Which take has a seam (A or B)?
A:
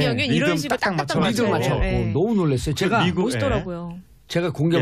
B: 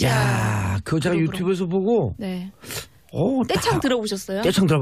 B